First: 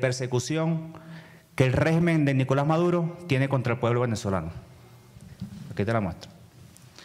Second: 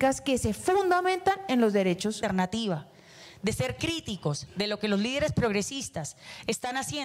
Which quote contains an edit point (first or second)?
second